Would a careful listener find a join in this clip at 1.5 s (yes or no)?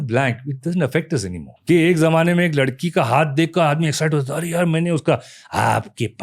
yes